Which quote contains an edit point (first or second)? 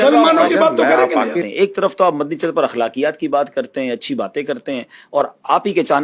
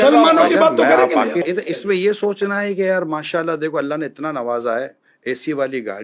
first